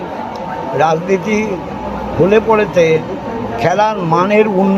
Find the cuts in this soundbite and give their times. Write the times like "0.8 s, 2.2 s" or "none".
none